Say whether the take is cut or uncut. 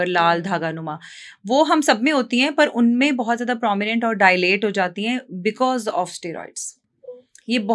uncut